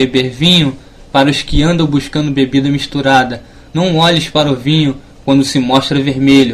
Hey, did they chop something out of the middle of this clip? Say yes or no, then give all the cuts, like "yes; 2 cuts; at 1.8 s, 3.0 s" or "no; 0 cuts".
no; 0 cuts